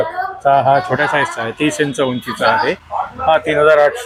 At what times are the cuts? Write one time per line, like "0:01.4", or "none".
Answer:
none